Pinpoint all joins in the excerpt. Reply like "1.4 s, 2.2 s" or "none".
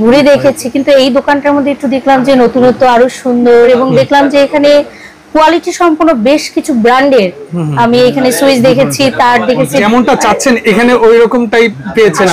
3.7 s, 9.8 s